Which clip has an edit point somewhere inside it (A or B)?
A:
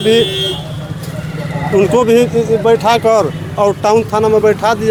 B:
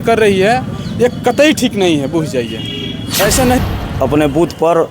B